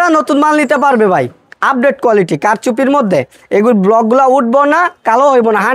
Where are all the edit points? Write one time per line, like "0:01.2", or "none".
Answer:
0:01.5